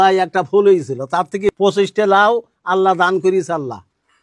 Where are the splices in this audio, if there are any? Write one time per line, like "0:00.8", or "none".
0:01.5